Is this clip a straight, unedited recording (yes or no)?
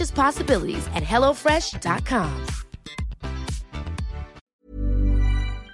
no